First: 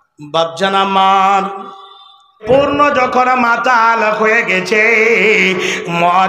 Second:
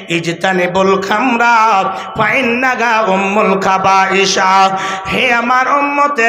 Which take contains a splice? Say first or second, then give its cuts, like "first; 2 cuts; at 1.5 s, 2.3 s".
first; 1 cut; at 2.4 s